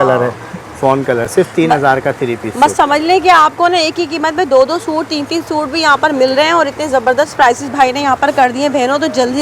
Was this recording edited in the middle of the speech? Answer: no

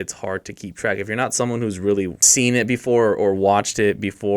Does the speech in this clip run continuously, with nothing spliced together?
no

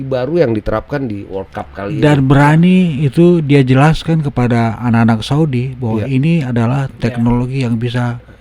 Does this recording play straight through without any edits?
yes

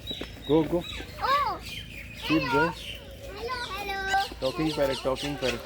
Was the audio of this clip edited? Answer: yes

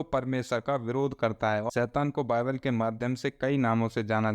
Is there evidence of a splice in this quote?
yes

